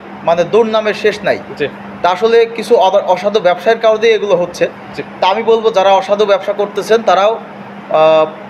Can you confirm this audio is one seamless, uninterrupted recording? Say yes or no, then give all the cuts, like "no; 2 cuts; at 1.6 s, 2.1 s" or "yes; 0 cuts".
yes; 0 cuts